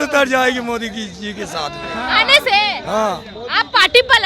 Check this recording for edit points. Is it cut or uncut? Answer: uncut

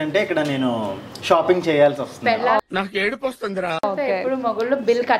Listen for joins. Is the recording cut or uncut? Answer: uncut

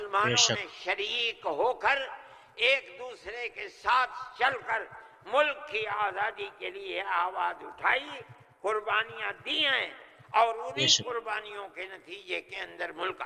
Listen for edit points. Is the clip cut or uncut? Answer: uncut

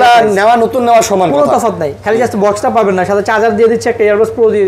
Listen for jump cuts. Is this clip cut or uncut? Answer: uncut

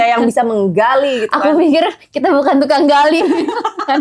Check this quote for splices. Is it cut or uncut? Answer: uncut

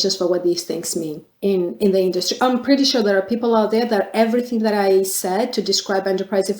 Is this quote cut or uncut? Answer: cut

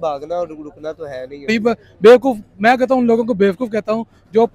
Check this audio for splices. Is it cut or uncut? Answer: cut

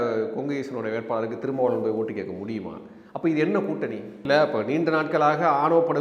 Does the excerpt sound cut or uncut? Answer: cut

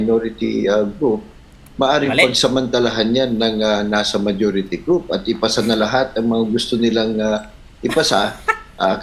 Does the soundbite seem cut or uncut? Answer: uncut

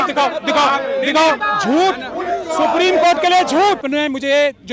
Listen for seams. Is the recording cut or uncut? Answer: cut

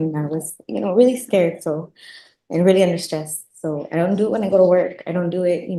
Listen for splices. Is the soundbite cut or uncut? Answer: uncut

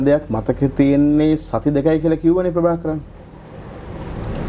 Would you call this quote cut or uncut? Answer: uncut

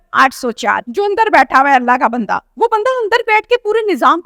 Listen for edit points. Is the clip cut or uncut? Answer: cut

